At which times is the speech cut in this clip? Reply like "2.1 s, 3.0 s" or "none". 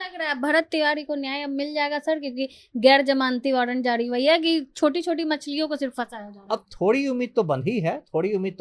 none